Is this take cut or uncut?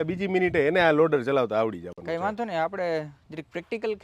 uncut